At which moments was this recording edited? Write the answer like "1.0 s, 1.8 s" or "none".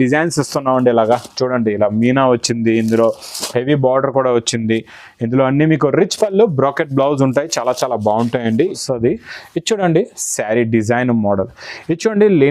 8.8 s